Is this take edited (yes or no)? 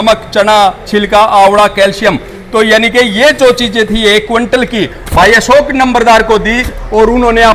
no